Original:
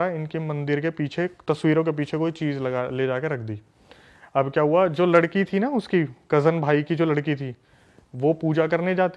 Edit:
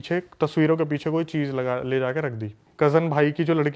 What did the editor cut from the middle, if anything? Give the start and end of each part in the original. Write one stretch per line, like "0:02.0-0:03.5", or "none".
0:03.7-0:06.2

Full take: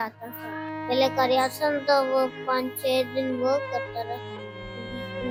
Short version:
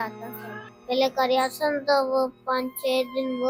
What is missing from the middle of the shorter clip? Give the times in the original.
none

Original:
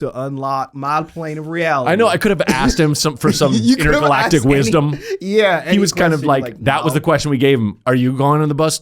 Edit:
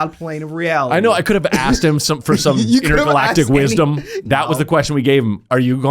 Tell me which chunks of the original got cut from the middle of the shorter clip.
0:05.1-0:06.5

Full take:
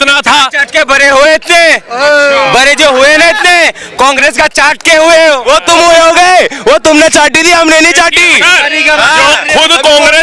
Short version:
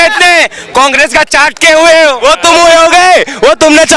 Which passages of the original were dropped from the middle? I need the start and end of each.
none

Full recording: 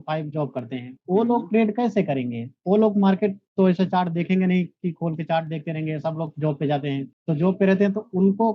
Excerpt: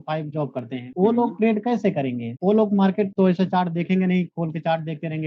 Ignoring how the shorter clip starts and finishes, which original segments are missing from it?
0:00.8-0:01.0
0:02.4-0:02.5
0:03.4-0:03.5
0:04.7-0:05.0

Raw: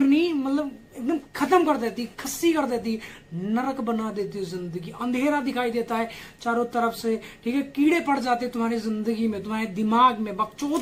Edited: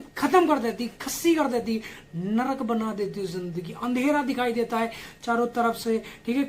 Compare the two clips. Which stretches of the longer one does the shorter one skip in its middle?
none

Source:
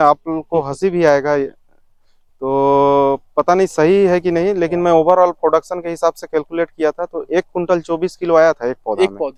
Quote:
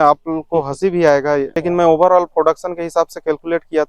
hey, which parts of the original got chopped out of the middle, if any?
0:01.6-0:04.6

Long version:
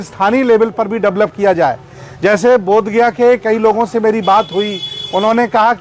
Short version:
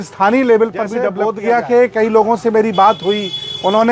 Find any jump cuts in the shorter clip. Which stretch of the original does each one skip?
0:01.1-0:02.6

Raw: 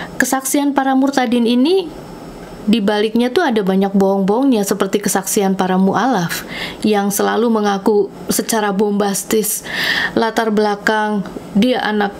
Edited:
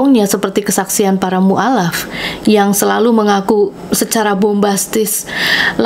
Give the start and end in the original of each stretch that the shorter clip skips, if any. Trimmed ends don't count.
none

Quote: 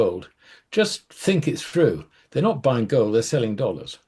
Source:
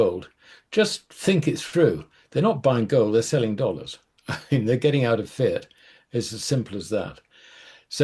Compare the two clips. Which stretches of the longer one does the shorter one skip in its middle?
none

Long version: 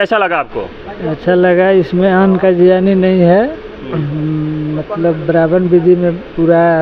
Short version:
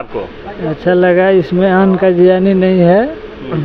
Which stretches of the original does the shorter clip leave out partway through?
none

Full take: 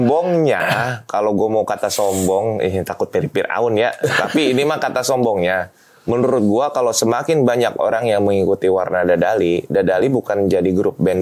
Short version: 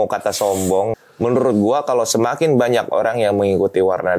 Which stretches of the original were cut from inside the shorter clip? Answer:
0:02.5-0:05.8

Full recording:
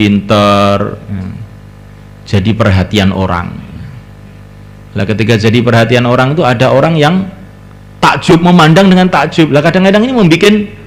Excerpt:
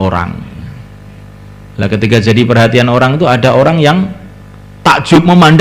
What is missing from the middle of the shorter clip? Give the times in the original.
none

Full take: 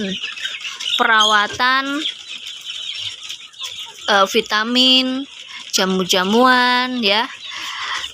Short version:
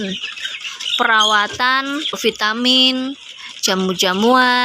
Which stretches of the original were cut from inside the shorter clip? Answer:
0:02.2-0:04.3

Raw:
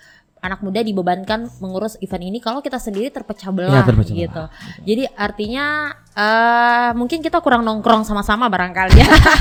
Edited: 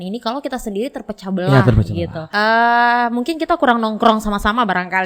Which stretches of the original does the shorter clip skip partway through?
0:04.4-0:06.0

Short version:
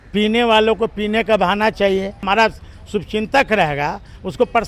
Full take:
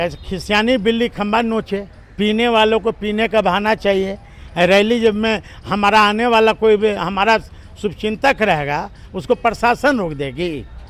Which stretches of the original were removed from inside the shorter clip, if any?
0:04.2-0:07.1

